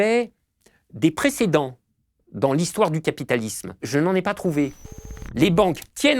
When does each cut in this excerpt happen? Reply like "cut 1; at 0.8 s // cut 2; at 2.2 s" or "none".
cut 1; at 3.8 s // cut 2; at 4.9 s